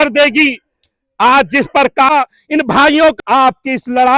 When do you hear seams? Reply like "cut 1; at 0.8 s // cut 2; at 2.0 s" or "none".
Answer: cut 1; at 2.1 s // cut 2; at 3.2 s